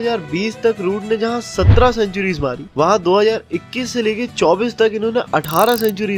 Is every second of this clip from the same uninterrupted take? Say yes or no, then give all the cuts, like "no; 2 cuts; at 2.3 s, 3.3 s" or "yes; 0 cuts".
yes; 0 cuts